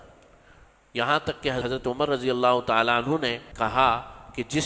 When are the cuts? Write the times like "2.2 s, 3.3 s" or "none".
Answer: 1.6 s, 3.4 s